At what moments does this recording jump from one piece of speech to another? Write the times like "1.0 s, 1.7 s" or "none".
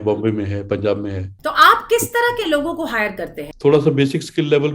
1.3 s, 3.4 s